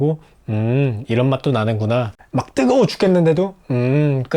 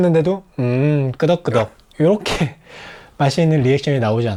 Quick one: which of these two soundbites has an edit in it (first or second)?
first